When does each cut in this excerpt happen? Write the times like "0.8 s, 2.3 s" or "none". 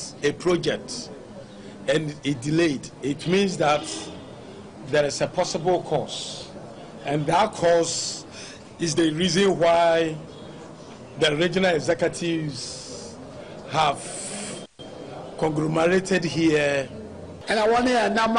17.3 s